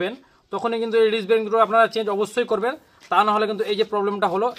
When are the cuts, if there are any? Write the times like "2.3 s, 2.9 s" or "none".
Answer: none